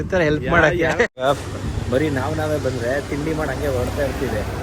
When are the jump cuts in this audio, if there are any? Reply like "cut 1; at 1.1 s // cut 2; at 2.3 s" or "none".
cut 1; at 1.2 s